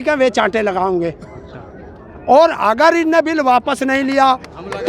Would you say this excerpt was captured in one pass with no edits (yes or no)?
yes